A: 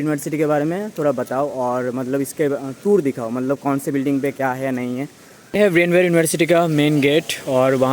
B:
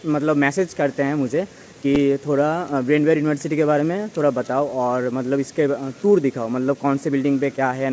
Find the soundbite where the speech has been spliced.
A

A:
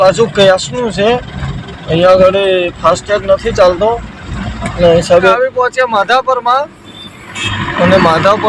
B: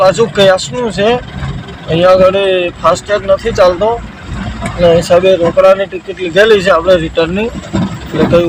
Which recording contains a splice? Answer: A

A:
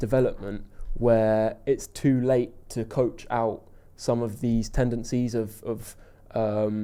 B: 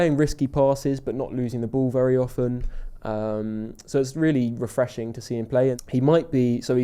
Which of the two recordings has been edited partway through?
B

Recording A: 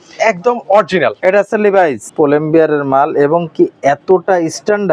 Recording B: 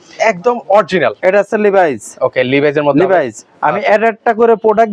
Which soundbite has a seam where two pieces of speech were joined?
A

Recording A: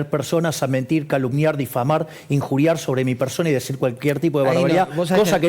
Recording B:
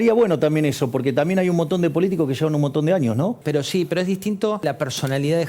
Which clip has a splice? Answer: B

